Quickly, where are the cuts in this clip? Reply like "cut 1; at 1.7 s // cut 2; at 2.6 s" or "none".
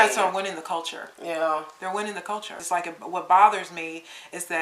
cut 1; at 2.6 s